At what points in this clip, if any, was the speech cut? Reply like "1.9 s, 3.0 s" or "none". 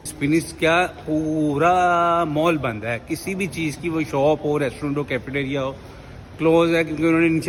none